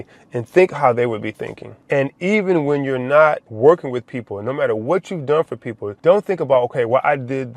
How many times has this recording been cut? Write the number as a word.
zero